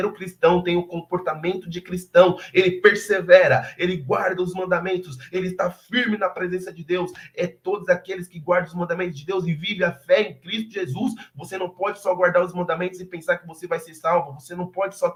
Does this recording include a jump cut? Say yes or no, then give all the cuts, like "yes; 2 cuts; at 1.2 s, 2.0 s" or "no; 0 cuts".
no; 0 cuts